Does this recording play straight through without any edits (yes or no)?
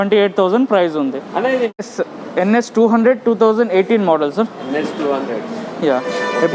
no